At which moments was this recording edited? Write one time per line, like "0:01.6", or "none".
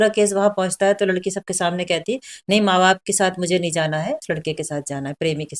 0:04.2